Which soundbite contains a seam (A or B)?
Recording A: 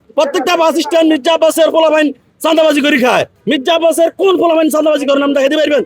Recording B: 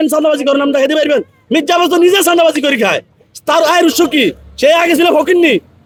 A